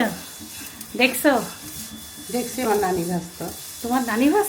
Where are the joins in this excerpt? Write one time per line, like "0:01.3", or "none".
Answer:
none